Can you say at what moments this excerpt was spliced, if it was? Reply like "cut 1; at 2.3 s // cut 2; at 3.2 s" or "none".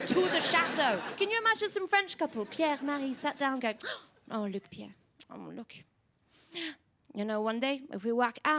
cut 1; at 1.1 s